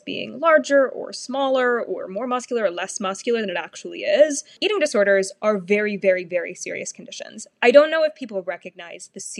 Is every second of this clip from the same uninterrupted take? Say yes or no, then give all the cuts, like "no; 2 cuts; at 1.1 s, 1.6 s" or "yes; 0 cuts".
no; 1 cut; at 4.6 s